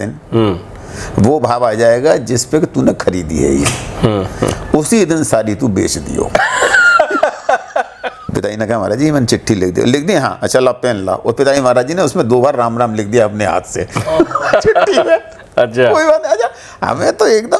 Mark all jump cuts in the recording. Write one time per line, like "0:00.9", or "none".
0:08.2